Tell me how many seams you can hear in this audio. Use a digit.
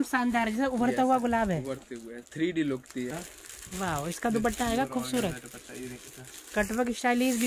1